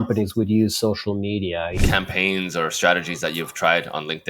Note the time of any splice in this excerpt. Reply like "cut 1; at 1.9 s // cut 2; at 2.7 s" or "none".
cut 1; at 1.8 s